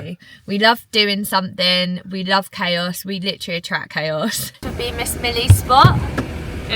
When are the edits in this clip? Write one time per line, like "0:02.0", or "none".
0:04.6